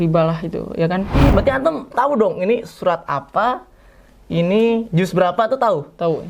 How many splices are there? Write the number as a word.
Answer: one